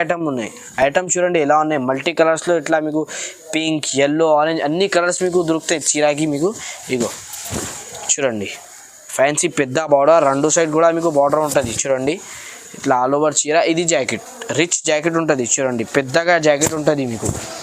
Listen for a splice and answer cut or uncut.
uncut